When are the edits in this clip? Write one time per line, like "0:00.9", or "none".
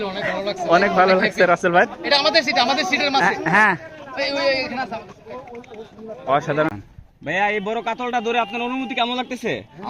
0:06.7